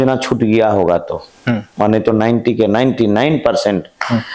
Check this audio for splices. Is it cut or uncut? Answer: uncut